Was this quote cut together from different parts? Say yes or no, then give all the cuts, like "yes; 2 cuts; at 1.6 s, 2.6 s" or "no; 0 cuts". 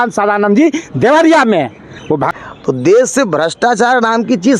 yes; 1 cut; at 2.3 s